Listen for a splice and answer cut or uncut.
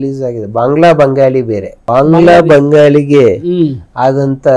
cut